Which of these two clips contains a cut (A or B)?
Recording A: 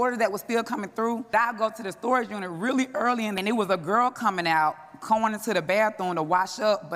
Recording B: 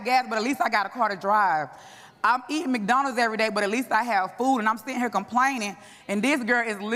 A